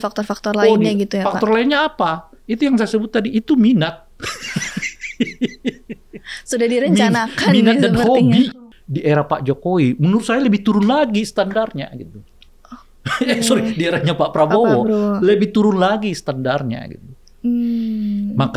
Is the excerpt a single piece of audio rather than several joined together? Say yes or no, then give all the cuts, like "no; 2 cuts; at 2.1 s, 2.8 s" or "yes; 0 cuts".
no; 1 cut; at 8.5 s